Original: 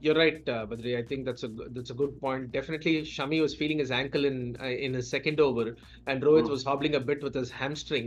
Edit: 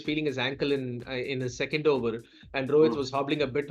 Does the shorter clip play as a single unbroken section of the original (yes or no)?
yes